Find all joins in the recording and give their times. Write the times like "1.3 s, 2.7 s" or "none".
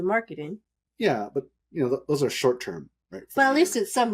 none